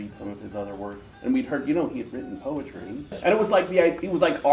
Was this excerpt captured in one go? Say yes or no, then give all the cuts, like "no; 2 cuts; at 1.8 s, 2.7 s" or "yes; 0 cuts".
no; 2 cuts; at 1.1 s, 3.2 s